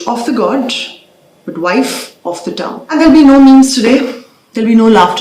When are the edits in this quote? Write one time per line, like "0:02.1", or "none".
0:02.8